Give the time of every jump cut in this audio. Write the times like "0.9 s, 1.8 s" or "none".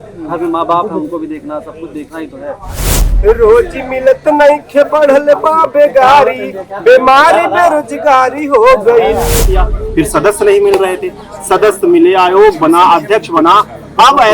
3.1 s, 9.4 s